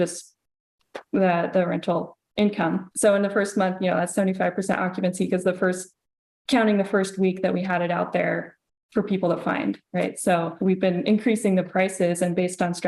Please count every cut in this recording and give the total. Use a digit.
2